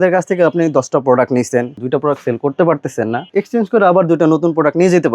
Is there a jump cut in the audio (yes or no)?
yes